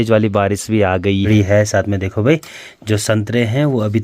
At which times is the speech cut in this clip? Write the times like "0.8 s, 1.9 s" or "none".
1.3 s